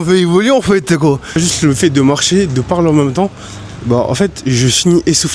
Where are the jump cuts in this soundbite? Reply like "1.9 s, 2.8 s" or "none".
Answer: 1.4 s